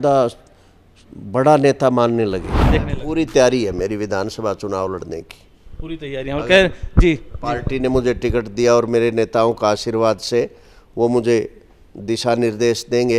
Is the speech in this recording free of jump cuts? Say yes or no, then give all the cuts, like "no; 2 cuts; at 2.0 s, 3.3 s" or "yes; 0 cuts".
no; 1 cut; at 3.0 s